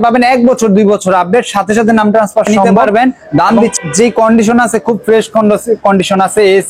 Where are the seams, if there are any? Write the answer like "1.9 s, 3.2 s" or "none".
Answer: 3.7 s